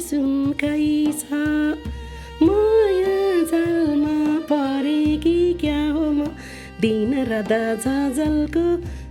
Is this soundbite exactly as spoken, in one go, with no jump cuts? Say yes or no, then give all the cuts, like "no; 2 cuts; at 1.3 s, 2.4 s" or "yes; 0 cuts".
yes; 0 cuts